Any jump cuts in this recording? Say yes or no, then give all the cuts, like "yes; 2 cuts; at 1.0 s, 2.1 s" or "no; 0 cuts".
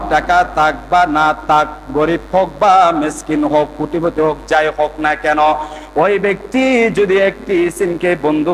no; 0 cuts